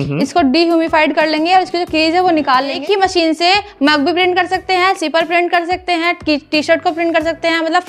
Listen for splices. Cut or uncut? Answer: cut